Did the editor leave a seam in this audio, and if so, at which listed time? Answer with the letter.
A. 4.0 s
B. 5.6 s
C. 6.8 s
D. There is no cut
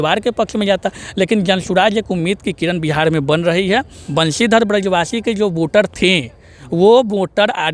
A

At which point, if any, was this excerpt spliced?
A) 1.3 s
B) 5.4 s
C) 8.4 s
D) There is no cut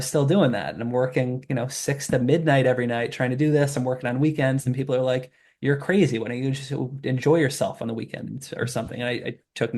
D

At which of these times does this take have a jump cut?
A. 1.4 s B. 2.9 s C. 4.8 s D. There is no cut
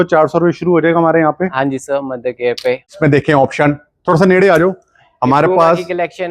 B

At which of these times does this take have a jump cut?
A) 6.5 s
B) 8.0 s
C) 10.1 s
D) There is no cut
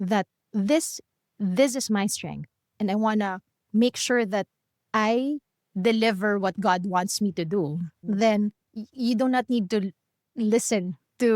B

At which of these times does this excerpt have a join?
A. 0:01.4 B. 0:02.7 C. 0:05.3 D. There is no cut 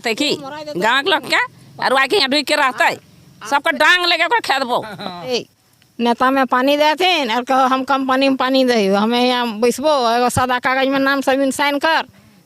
C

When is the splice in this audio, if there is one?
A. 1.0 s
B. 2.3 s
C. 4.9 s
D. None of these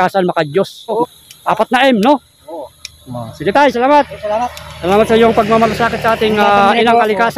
A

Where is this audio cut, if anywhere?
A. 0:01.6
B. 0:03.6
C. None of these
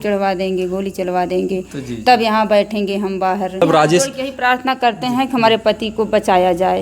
B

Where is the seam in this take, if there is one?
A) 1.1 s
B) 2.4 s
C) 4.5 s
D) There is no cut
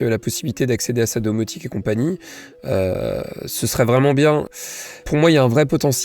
C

